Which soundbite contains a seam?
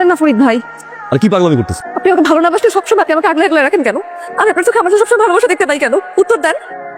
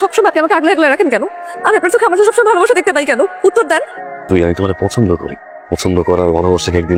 first; 1 cut; at 1.8 s

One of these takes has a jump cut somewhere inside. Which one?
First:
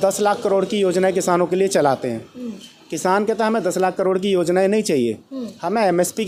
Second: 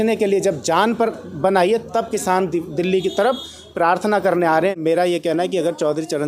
second; 1 cut; at 4.7 s

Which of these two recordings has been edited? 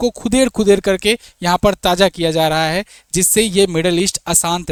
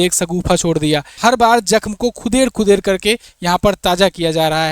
second; 1 cut; at 1.1 s

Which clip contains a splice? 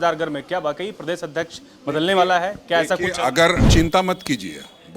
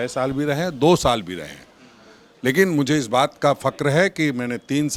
first; 1 cut; at 3.7 s

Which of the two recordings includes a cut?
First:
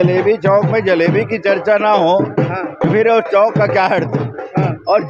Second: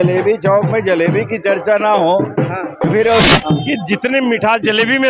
second; 1 cut; at 3.3 s

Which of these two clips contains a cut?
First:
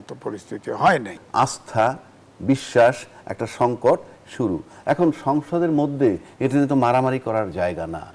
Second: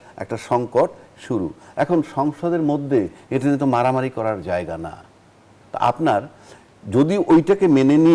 first; 1 cut; at 1.2 s

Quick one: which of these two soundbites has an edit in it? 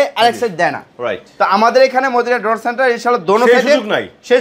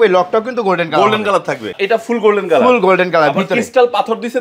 second; 1 cut; at 1.7 s

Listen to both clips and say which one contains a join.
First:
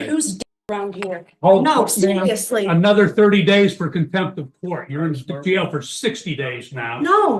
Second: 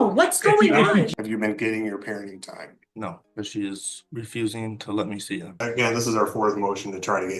second; 4 cuts; at 1.1 s, 3.2 s, 3.9 s, 5.6 s

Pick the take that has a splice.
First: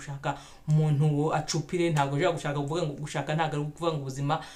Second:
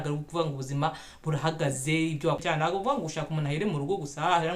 second; 1 cut; at 2.4 s

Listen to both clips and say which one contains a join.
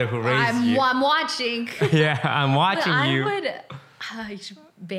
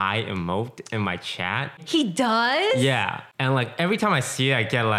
second; 2 cuts; at 1.8 s, 3.2 s

